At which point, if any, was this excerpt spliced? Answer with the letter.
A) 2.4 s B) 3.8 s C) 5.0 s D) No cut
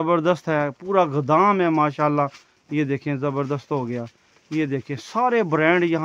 D